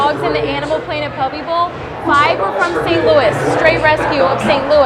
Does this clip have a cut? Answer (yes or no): no